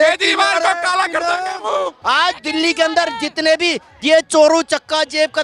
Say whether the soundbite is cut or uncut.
cut